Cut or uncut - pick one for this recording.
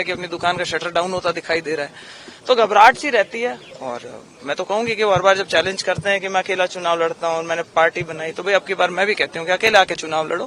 cut